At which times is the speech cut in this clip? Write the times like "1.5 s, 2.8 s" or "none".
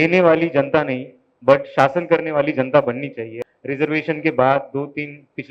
3.3 s